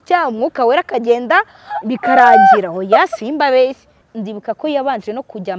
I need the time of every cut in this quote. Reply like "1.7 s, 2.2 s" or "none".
4.0 s